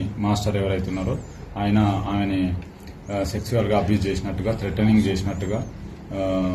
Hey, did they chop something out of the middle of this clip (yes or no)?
no